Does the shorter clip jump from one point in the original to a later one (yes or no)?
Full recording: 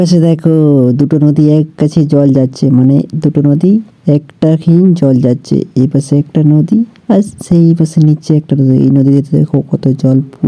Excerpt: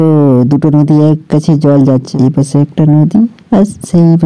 yes